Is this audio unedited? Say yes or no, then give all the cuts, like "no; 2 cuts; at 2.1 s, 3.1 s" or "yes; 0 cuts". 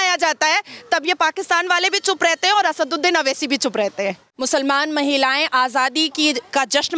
no; 1 cut; at 4.3 s